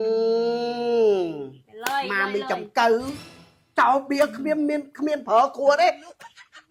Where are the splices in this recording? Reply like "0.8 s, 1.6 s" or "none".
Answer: none